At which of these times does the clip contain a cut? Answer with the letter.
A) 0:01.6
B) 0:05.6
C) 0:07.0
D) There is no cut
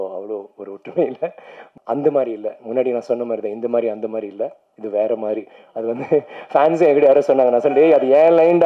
A